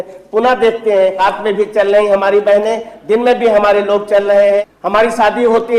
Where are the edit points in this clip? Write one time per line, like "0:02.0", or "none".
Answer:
0:01.2
0:04.7